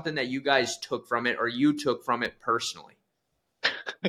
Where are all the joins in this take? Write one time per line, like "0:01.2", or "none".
none

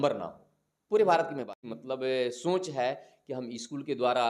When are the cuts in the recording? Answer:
0:01.7

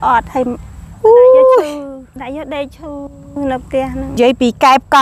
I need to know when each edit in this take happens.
0:02.1
0:04.2

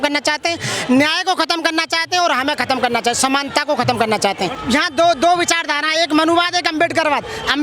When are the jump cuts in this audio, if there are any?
0:04.6

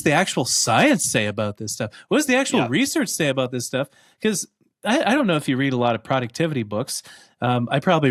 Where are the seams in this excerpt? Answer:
none

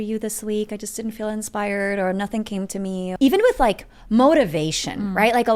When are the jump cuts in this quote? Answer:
0:03.1

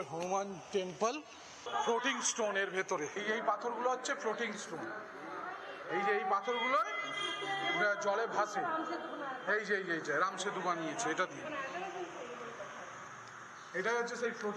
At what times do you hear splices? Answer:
none

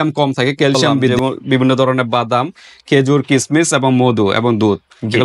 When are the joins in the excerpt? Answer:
0:01.1

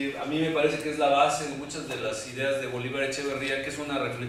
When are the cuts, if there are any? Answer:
none

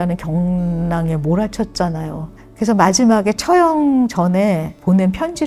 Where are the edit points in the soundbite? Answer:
none

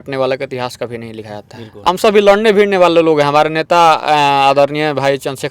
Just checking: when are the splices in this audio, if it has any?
0:01.9

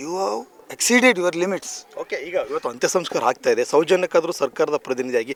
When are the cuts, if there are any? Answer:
none

